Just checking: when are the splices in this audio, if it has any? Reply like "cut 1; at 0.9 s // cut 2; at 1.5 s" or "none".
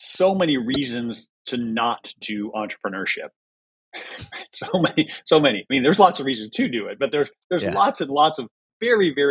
none